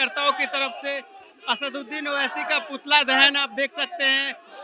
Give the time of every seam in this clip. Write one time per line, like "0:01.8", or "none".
none